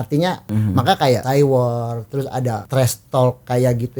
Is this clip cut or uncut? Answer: cut